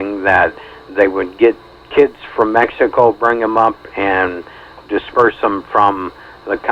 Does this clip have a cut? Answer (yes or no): no